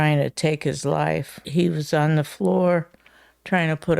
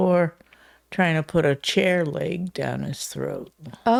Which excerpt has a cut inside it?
first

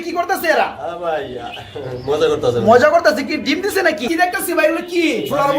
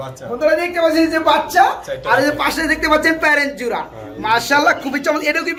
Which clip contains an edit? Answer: first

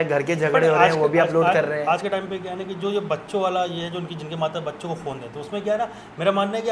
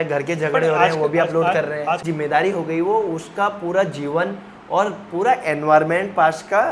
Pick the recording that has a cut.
second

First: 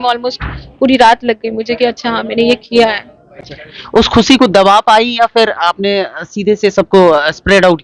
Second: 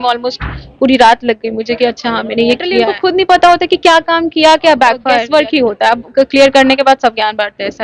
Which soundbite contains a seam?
second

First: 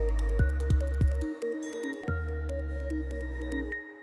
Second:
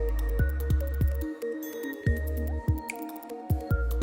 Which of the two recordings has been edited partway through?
first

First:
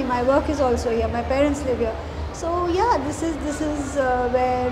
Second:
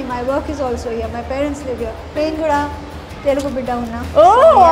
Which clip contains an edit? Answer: second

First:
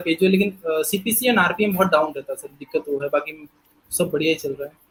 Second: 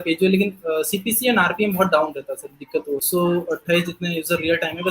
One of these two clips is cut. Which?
second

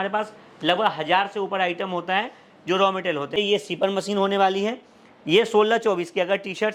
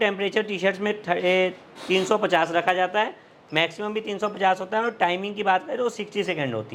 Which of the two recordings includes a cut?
first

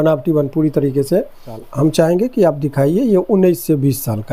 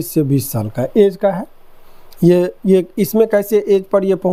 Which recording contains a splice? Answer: first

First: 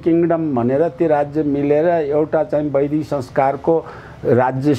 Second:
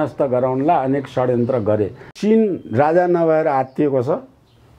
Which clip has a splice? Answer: second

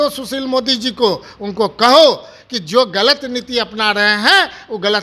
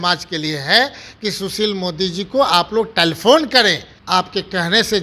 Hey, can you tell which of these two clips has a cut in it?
second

